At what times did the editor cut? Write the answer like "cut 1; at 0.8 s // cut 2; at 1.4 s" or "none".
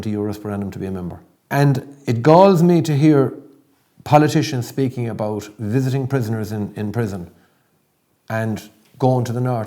cut 1; at 1.3 s